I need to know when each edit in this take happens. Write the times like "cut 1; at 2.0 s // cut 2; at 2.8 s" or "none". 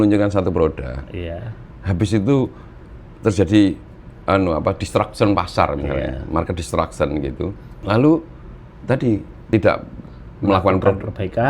cut 1; at 7.7 s // cut 2; at 9.3 s